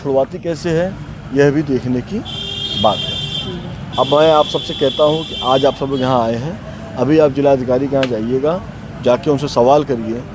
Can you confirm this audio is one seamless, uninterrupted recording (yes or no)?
yes